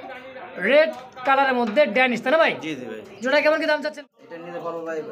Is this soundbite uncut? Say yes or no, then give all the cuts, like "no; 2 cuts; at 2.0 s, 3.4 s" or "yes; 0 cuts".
no; 1 cut; at 3.8 s